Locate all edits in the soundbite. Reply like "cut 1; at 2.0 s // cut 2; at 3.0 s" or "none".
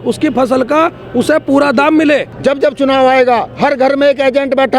cut 1; at 2.3 s